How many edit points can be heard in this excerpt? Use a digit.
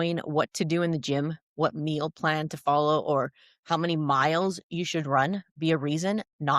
0